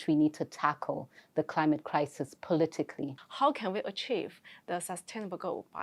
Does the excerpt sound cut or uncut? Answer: cut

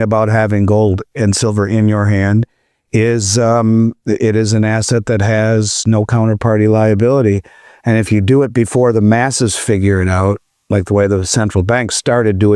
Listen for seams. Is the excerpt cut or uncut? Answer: uncut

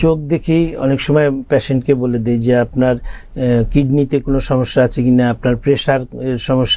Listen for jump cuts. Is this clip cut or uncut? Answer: uncut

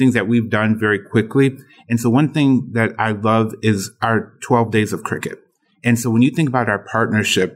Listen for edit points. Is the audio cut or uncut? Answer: cut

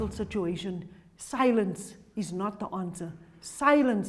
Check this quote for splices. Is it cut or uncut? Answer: uncut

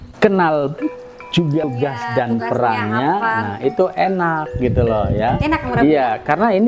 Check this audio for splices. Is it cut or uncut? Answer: cut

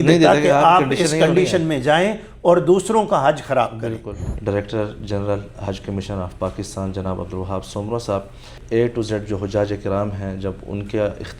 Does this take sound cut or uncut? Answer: cut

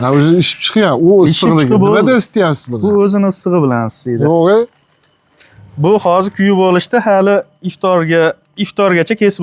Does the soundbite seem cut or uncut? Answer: uncut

